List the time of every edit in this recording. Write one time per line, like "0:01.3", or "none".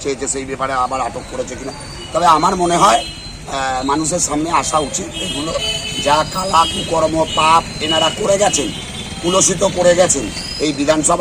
none